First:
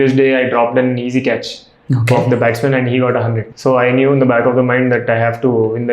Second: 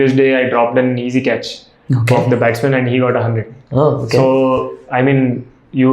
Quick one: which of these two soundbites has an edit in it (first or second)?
first